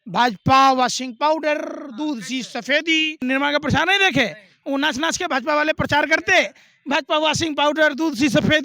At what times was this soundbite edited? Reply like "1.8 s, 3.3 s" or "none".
3.2 s